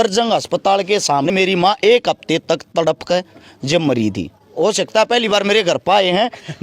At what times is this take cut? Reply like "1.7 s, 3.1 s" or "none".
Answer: 1.3 s, 4.5 s